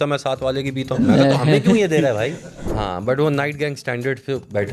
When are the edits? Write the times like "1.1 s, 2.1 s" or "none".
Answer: 2.7 s